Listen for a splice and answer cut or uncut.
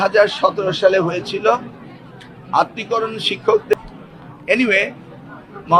cut